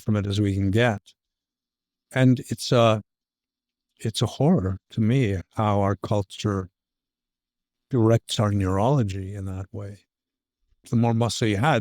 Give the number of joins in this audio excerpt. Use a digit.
1